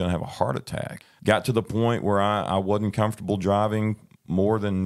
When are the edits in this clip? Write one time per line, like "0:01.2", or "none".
0:01.0